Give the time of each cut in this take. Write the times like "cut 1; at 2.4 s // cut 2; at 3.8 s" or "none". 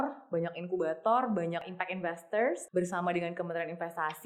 cut 1; at 1.7 s // cut 2; at 2.6 s